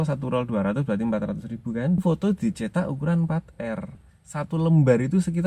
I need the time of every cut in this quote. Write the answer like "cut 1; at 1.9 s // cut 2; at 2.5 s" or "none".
cut 1; at 2.0 s // cut 2; at 4.1 s